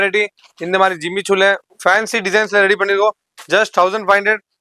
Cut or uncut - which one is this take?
cut